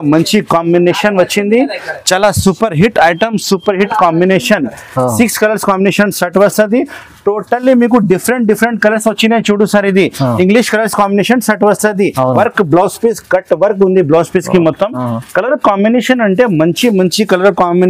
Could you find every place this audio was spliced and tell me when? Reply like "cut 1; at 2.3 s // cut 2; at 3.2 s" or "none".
cut 1; at 12.3 s